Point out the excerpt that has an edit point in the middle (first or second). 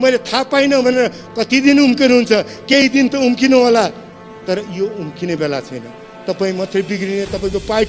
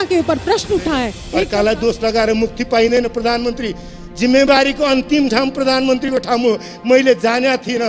second